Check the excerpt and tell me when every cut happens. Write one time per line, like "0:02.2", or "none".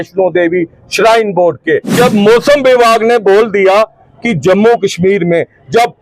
0:01.9